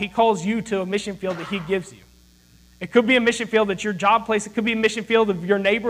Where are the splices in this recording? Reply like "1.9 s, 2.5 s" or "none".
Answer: none

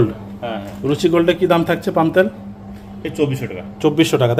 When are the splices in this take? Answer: none

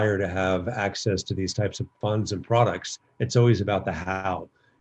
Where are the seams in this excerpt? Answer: 1.9 s

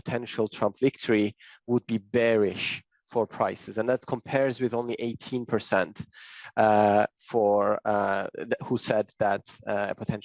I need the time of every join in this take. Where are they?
none

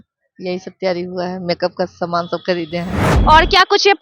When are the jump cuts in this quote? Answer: 3.1 s

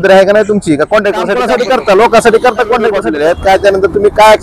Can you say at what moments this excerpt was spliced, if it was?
1.4 s, 3.0 s

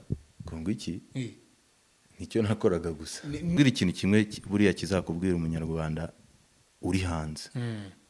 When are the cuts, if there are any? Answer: 3.6 s

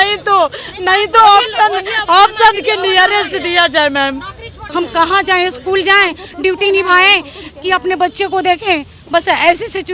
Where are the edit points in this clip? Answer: 4.6 s

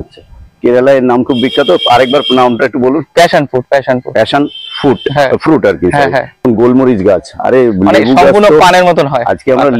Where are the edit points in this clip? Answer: 6.4 s

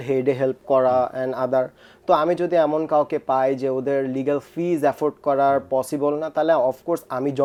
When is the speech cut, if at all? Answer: none

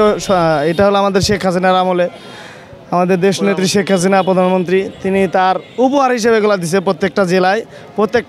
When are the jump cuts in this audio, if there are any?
none

